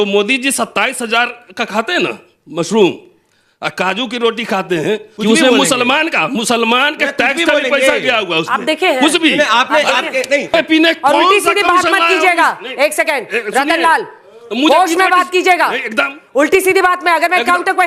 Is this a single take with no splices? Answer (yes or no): no